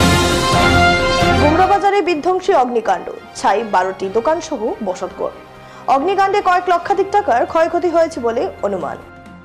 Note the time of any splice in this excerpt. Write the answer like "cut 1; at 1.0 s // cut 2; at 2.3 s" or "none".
none